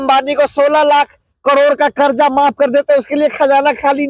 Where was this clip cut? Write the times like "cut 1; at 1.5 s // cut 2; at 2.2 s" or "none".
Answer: none